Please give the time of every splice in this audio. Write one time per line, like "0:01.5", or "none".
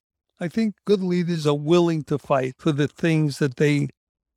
none